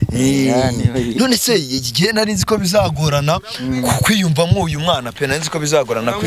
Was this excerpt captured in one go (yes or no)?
yes